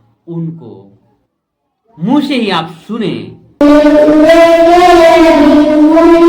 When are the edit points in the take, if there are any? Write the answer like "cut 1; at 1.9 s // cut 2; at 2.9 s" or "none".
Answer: cut 1; at 3.6 s